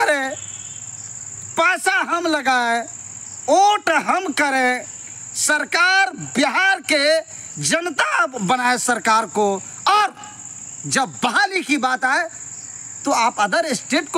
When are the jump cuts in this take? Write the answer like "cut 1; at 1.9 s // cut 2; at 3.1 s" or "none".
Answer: none